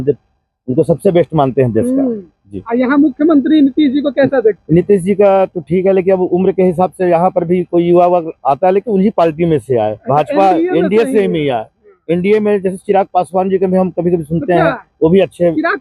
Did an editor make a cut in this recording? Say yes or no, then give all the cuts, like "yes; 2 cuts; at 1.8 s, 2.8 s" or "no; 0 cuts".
no; 0 cuts